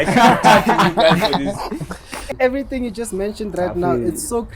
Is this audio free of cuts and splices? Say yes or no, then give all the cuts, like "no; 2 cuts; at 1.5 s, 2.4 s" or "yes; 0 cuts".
no; 1 cut; at 2.2 s